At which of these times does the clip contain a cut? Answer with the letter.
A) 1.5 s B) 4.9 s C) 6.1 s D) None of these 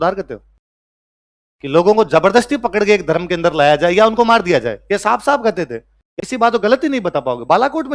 C